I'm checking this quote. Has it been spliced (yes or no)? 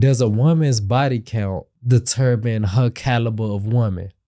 yes